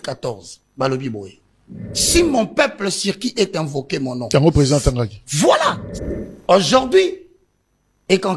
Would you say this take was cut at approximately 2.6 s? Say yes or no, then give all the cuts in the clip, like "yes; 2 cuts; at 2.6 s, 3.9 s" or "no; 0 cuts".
no; 1 cut; at 5.8 s